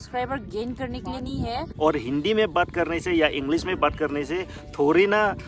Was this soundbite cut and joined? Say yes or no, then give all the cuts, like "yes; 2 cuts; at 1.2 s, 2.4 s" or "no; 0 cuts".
yes; 1 cut; at 1.7 s